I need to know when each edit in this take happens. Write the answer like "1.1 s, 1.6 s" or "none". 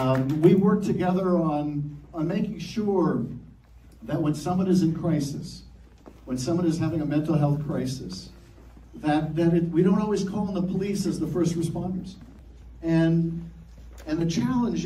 3.2 s, 8.2 s, 13.2 s